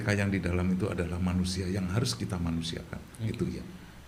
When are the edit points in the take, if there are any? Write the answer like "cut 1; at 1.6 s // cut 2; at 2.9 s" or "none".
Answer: none